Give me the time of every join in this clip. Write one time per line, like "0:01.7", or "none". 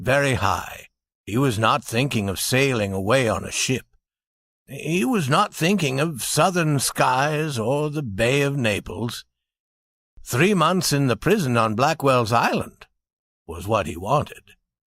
0:08.8